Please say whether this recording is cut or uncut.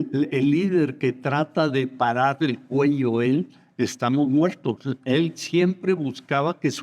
uncut